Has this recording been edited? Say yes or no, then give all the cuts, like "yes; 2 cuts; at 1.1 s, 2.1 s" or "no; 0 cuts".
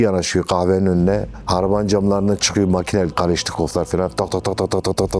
no; 0 cuts